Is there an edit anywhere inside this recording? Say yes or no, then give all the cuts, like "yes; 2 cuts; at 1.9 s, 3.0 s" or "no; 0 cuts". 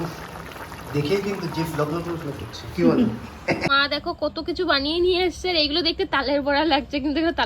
yes; 1 cut; at 3.7 s